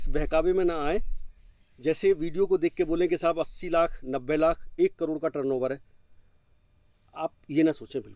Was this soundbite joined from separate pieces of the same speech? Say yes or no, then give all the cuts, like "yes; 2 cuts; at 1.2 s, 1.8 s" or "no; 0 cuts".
no; 0 cuts